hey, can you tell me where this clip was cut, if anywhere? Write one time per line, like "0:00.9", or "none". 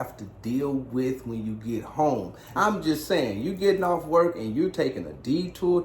0:02.4